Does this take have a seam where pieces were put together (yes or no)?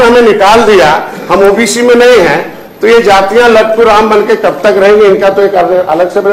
no